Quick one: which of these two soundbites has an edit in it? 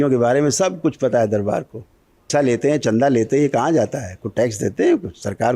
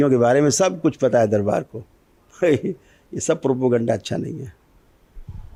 first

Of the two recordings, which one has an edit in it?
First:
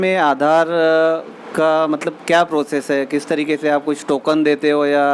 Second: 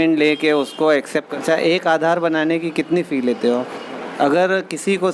second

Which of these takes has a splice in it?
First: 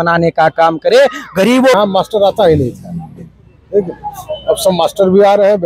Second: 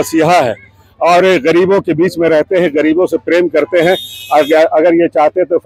first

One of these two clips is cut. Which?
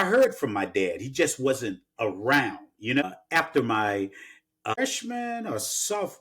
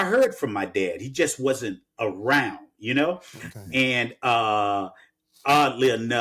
first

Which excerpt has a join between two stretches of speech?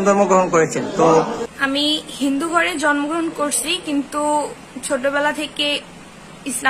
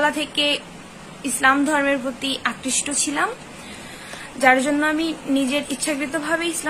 first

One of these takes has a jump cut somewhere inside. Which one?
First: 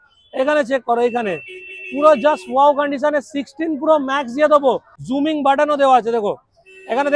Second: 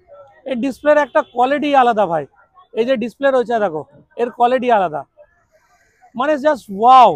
first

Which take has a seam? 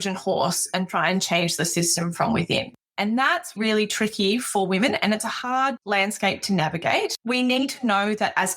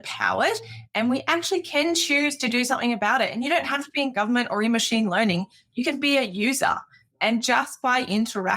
first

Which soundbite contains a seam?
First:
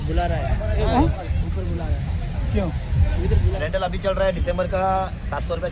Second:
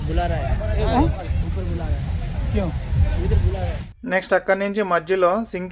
first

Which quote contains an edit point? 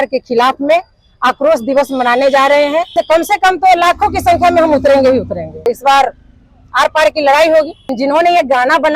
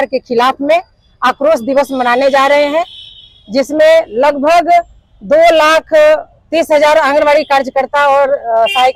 first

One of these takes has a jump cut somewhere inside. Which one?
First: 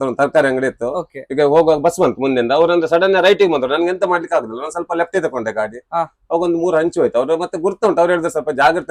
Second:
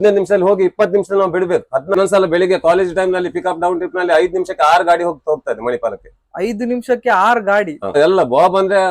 second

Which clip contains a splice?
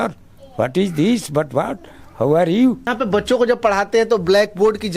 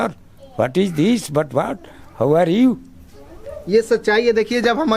first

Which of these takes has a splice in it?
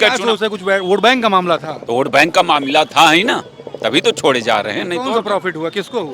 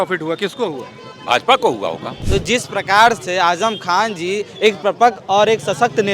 second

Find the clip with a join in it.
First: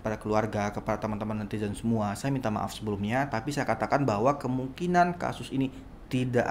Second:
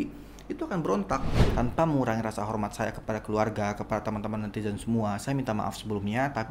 second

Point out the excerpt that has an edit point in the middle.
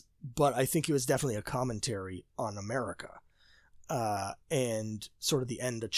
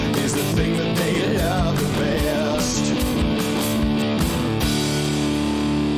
second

